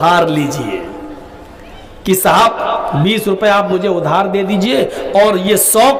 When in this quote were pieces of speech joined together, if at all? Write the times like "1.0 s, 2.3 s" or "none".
none